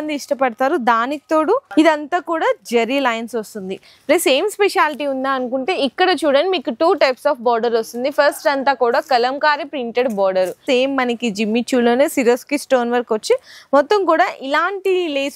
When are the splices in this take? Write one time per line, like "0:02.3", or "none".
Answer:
0:01.7
0:10.6